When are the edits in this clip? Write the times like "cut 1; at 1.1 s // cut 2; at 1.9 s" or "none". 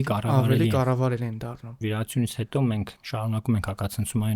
cut 1; at 1.8 s